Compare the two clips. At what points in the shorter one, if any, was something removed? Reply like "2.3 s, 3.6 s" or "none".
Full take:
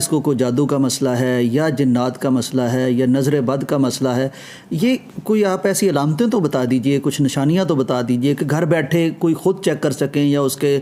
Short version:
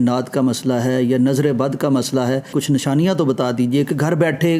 2.5 s